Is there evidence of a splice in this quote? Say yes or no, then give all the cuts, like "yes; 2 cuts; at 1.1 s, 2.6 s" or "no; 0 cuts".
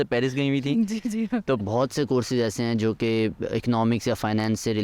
yes; 1 cut; at 1.6 s